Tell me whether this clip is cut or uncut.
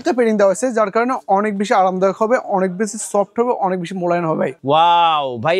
cut